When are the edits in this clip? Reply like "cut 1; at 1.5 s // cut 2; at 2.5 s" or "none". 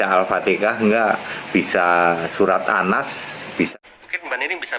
cut 1; at 3.7 s